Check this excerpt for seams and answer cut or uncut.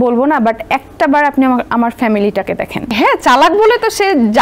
cut